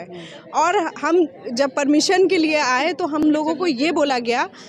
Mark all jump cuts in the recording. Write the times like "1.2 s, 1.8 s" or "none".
none